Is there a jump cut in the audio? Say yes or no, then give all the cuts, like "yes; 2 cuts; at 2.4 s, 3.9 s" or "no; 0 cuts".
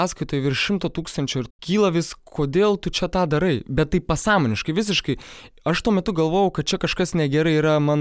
yes; 1 cut; at 1.5 s